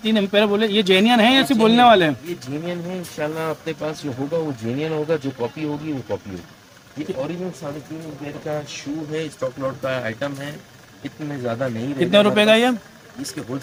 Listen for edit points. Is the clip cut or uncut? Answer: uncut